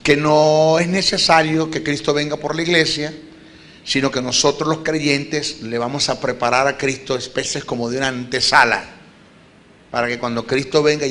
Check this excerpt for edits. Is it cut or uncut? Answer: cut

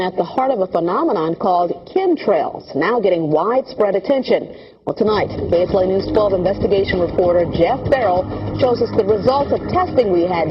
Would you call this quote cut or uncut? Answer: cut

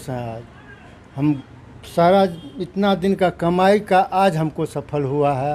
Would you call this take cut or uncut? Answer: uncut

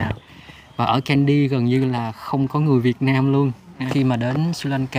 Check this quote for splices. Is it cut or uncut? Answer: cut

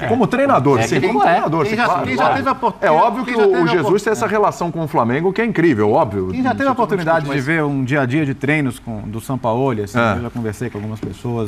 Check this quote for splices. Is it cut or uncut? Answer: uncut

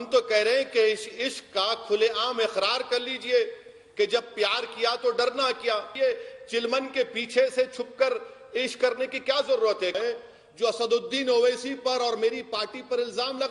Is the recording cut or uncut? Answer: cut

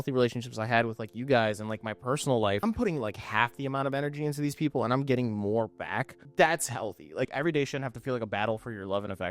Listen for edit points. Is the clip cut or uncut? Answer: cut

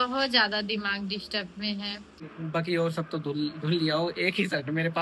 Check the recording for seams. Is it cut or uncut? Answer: cut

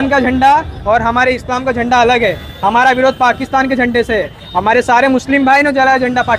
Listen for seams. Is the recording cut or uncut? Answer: uncut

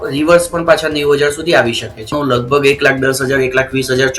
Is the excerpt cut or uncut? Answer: cut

